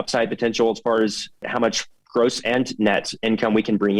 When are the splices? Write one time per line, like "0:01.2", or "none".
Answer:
0:01.5